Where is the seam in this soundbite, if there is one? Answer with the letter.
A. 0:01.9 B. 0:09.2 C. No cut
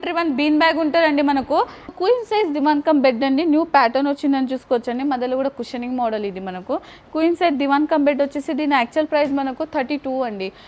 A